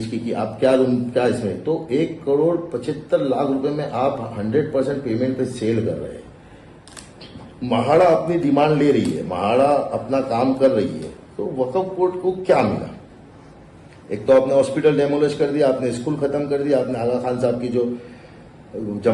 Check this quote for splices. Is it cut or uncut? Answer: uncut